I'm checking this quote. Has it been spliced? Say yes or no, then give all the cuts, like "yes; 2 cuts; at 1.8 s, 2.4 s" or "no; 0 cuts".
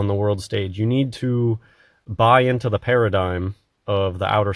no; 0 cuts